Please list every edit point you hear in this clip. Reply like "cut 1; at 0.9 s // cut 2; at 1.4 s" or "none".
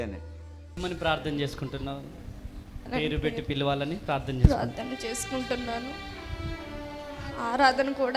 cut 1; at 0.8 s // cut 2; at 2.9 s